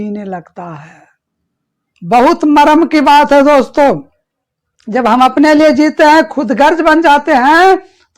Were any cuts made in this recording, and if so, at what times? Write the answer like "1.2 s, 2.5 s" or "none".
none